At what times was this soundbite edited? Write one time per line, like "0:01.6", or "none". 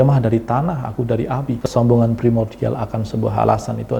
0:01.5